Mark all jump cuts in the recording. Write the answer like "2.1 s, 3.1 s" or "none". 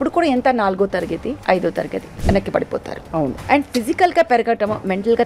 1.4 s, 2.1 s, 3.4 s